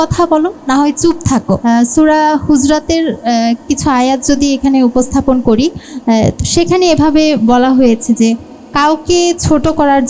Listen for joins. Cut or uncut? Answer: cut